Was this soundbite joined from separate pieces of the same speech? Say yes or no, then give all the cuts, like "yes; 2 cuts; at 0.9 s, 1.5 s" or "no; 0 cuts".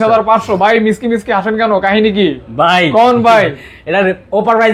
no; 0 cuts